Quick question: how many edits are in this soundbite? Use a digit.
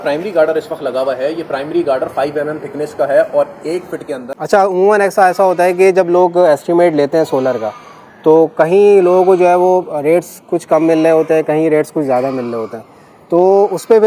1